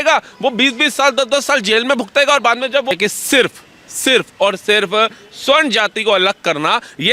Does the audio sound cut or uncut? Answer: cut